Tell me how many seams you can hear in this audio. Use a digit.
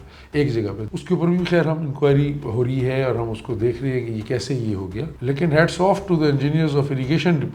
2